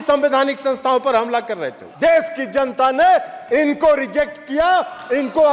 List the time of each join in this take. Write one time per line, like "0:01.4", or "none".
0:01.8